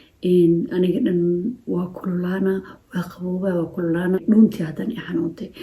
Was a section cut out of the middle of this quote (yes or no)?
yes